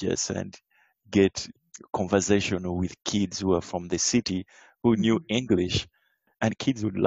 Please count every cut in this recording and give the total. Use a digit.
1